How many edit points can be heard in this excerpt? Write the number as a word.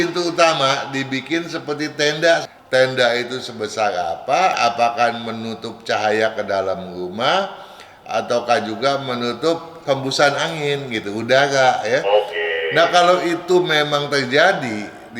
two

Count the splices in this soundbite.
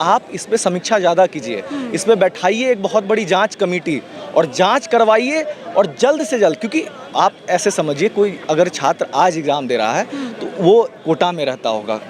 zero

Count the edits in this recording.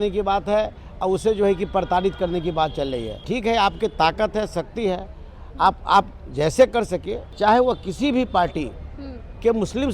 two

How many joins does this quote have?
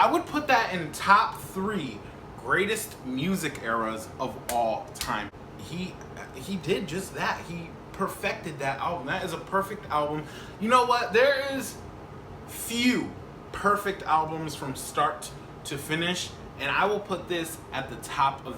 one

